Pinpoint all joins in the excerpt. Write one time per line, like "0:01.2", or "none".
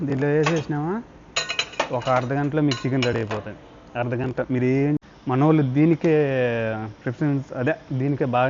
0:05.0